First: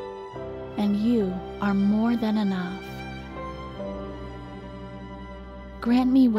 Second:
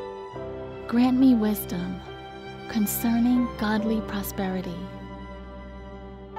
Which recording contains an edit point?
second; 2 cuts; at 0.7 s, 5.3 s

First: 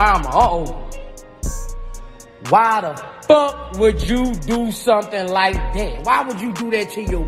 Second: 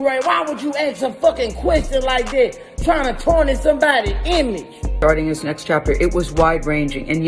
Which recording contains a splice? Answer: second; 1 cut; at 4.9 s

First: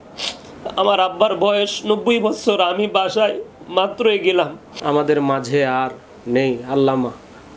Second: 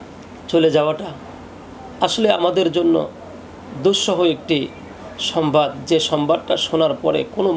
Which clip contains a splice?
first; 1 cut; at 4.7 s

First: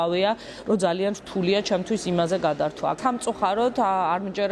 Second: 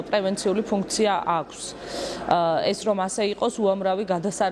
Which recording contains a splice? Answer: first; 1 cut; at 3.0 s

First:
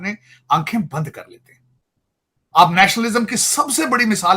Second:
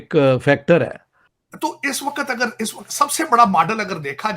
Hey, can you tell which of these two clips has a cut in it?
second; 1 cut; at 1.4 s

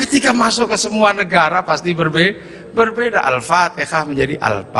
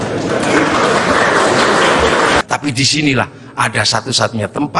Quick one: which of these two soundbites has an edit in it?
second; 1 cut; at 2.4 s

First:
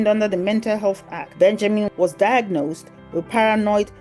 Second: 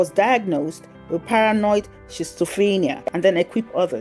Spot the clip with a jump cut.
second; 1 cut; at 3.0 s

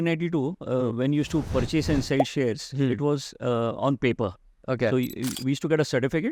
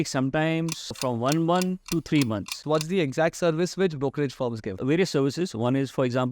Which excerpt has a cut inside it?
second; 3 cuts; at 1.0 s, 2.6 s, 4.8 s

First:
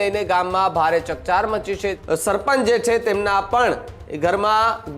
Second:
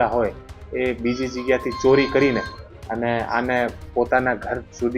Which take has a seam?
first; 1 cut; at 2.0 s

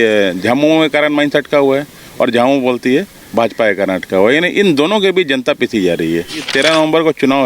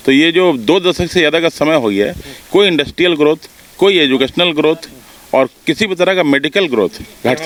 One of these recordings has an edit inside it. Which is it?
first; 1 cut; at 6.5 s

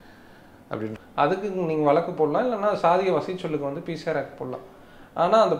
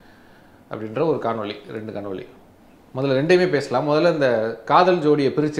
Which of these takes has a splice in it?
first; 1 cut; at 0.9 s

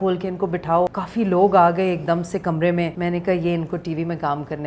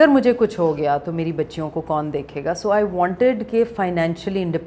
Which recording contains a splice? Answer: first; 2 cuts; at 1.0 s, 2.9 s

